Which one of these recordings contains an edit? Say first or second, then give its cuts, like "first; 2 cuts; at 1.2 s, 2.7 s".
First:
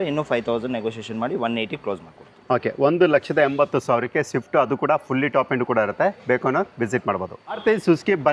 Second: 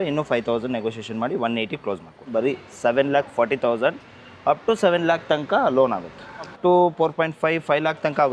second; 2 cuts; at 2.2 s, 6.5 s